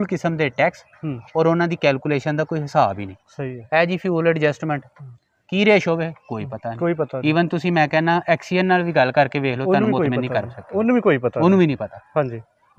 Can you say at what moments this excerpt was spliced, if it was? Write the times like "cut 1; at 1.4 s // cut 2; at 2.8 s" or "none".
none